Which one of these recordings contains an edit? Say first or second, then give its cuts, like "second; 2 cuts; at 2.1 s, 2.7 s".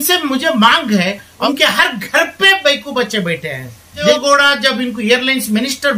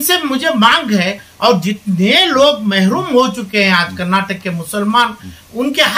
first; 2 cuts; at 1.5 s, 4.0 s